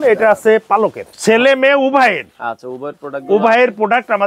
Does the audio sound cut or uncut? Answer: cut